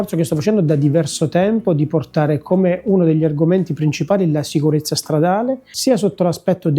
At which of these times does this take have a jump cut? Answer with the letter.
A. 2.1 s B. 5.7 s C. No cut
C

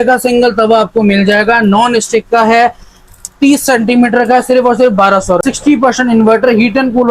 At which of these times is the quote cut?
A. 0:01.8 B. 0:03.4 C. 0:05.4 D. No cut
C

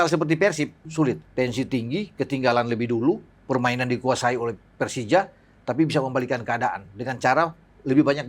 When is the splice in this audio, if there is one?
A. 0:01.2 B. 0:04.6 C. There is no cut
A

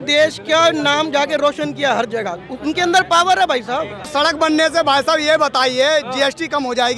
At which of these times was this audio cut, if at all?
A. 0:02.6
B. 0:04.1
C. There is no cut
B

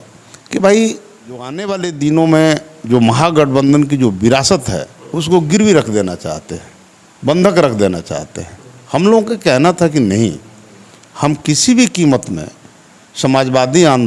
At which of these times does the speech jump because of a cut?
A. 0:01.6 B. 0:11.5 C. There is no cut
A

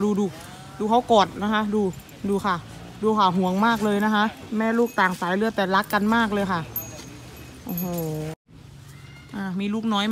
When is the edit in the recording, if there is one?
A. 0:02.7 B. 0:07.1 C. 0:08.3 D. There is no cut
C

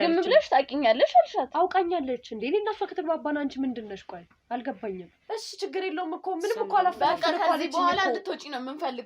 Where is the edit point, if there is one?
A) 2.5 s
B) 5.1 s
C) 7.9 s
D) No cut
B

